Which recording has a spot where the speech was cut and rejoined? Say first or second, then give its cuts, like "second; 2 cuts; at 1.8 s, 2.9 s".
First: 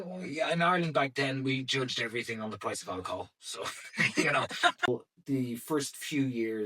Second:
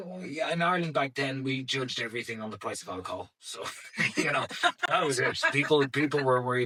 first; 1 cut; at 4.9 s